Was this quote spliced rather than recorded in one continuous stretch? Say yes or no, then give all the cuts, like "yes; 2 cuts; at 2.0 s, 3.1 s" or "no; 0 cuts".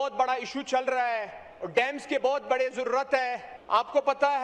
yes; 1 cut; at 3.5 s